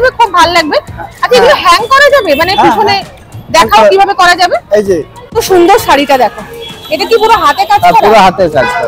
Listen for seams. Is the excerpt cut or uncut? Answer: cut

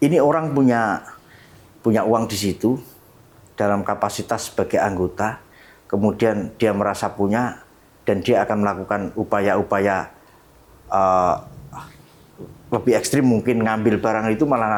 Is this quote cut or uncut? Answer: uncut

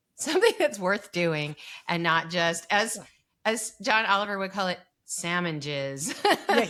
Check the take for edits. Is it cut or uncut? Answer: uncut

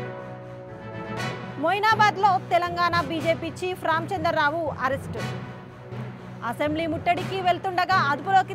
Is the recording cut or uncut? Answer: uncut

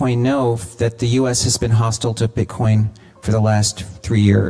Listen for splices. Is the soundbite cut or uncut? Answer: uncut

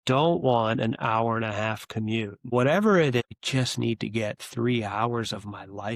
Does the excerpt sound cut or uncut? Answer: cut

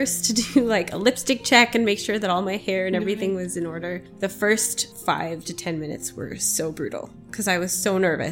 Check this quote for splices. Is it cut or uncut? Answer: cut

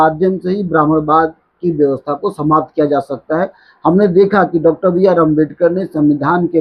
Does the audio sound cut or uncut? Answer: uncut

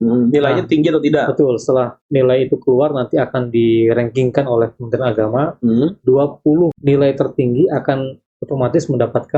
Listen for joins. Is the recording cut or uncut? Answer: cut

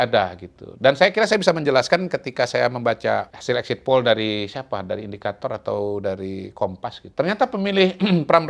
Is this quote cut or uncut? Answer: cut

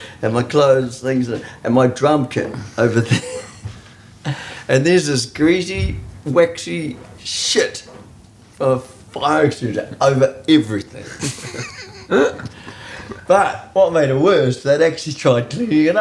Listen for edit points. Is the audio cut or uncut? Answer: uncut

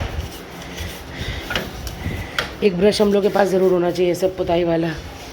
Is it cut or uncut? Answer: uncut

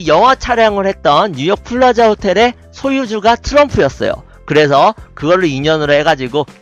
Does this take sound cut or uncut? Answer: uncut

